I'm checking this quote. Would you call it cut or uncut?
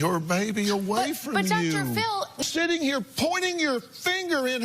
cut